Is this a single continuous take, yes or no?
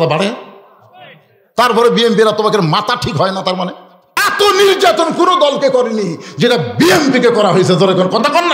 no